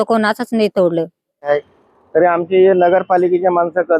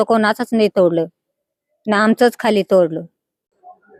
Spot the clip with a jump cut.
first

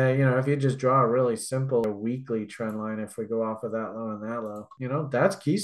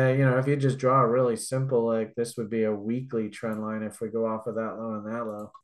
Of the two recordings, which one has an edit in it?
first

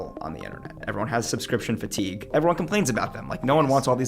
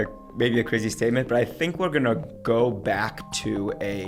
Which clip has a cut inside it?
first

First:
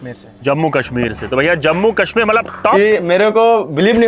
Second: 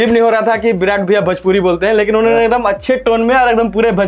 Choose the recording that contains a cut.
first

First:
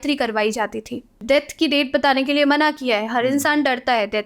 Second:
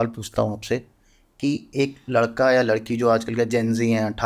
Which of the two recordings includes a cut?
first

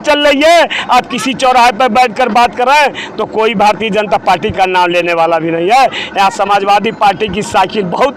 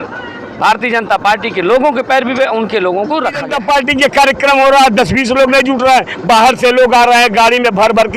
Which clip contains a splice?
second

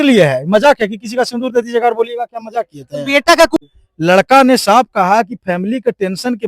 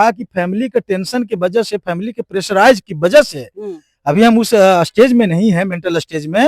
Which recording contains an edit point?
first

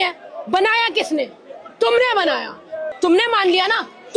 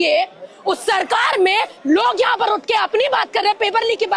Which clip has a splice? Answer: first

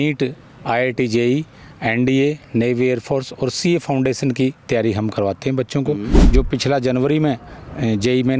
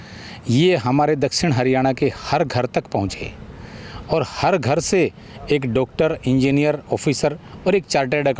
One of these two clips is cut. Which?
first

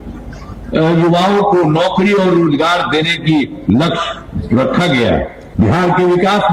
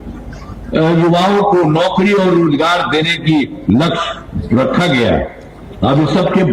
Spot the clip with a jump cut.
first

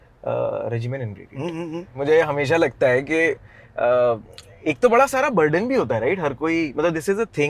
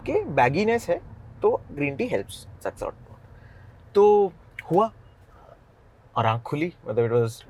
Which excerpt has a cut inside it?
first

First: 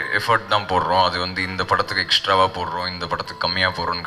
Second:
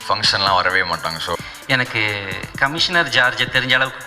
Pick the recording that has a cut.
second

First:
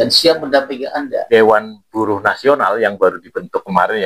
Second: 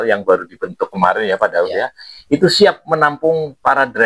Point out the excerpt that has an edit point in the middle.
first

